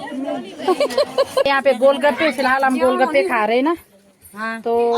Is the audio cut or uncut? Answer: cut